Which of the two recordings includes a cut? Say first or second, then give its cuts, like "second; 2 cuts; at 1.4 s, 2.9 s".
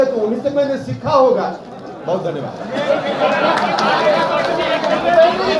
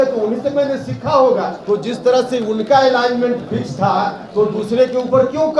second; 2 cuts; at 1.6 s, 4.2 s